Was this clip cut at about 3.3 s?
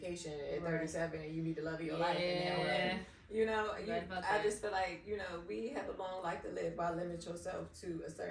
no; 0 cuts

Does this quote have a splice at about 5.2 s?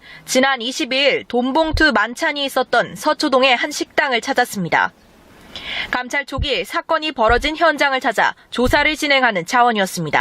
no; 1 cut; at 9.2 s

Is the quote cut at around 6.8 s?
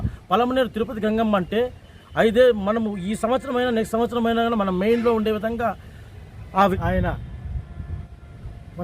yes; 1 cut; at 6.8 s

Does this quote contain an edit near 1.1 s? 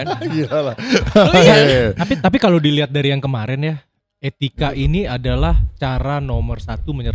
no; 0 cuts

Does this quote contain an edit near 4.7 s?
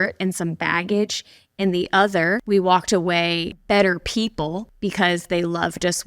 yes; 3 cuts; at 2.4 s, 3.5 s, 4.7 s

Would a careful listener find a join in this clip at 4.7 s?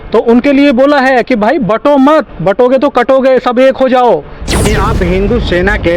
yes; 1 cut; at 4.7 s

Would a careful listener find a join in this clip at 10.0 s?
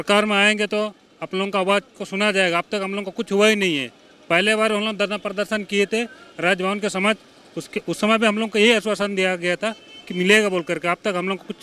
no; 0 cuts

